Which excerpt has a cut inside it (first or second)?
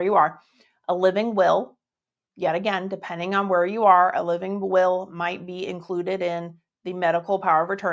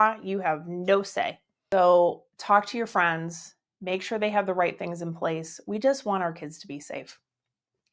second